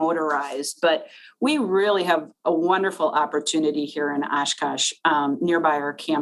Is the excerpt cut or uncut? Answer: uncut